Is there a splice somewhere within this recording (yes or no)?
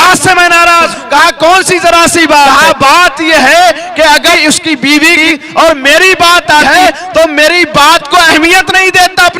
yes